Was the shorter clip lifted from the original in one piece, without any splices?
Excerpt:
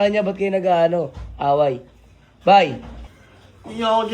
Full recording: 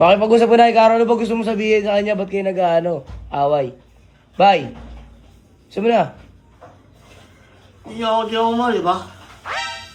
no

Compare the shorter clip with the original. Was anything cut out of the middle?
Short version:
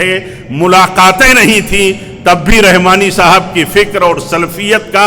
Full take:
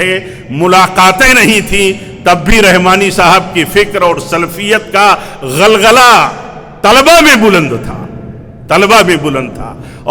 no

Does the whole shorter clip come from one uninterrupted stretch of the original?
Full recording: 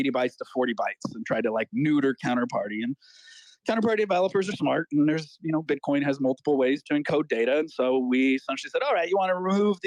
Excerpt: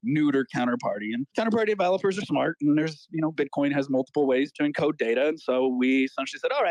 no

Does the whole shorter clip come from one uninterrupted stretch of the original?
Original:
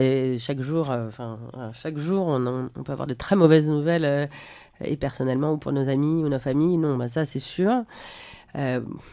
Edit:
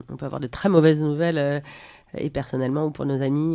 yes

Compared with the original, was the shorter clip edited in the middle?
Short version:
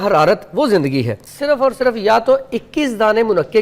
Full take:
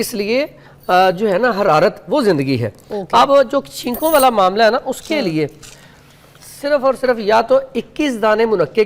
yes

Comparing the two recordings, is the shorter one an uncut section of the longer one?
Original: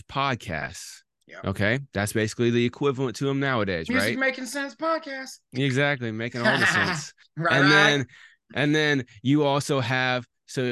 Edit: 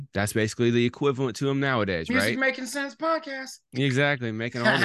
yes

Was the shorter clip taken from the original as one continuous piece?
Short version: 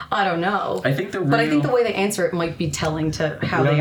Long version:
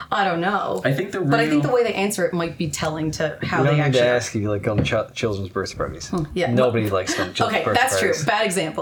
yes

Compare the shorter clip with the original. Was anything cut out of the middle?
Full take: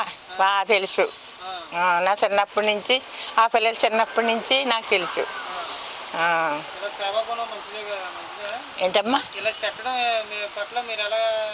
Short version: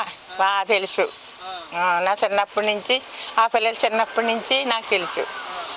no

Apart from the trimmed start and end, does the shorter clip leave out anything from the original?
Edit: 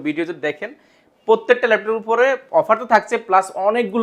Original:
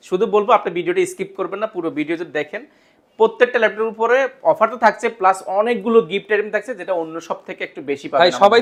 no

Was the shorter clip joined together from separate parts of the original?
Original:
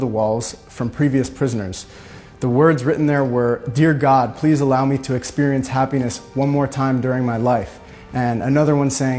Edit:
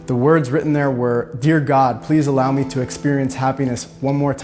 no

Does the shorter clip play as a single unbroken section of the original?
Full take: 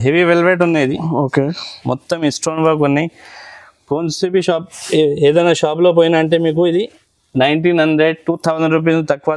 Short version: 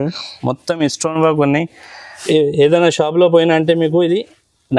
no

